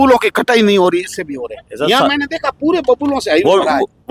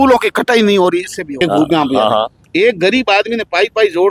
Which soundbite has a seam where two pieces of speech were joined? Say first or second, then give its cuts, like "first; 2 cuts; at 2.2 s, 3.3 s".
second; 1 cut; at 1.4 s